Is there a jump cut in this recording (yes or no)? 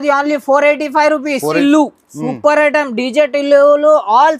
yes